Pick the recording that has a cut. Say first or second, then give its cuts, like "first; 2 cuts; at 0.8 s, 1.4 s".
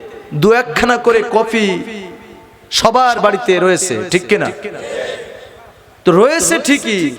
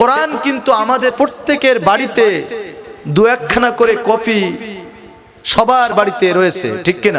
second; 1 cut; at 1.1 s